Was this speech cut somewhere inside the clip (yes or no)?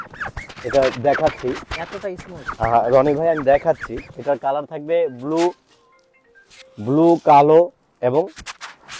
no